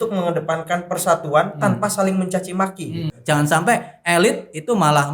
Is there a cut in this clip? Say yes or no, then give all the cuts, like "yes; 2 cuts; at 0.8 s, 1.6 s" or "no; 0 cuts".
yes; 1 cut; at 3.1 s